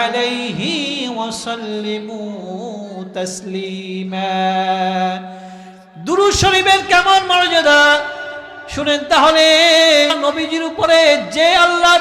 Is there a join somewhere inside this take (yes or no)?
yes